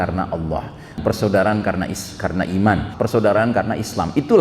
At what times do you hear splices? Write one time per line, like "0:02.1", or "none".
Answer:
0:01.0
0:02.9